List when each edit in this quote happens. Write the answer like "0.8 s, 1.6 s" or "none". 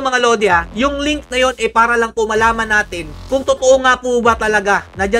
none

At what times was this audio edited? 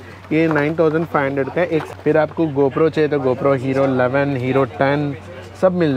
1.9 s

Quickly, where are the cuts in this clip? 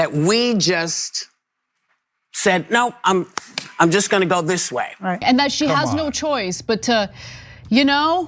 5.2 s

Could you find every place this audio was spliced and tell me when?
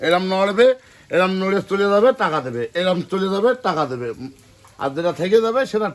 none

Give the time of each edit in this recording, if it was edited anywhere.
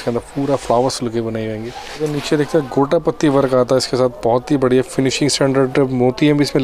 2.0 s

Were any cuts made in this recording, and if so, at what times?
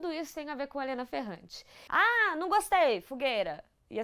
1.7 s

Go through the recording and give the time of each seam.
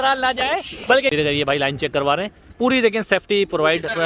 1.1 s

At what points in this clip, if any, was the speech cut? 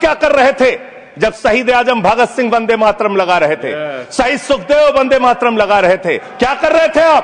6.3 s

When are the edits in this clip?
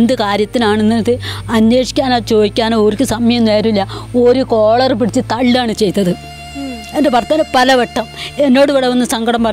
none

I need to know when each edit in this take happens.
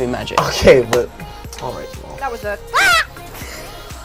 none

